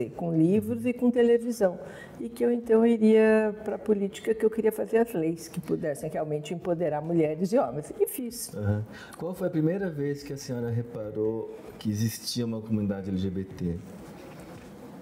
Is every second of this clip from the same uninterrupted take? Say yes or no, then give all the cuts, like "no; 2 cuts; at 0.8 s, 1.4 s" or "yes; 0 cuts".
yes; 0 cuts